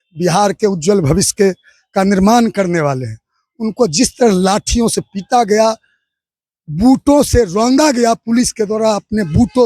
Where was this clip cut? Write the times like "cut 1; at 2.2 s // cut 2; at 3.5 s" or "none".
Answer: none